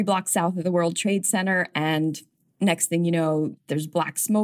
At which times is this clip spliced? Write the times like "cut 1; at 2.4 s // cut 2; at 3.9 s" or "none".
cut 1; at 2.5 s // cut 2; at 3.5 s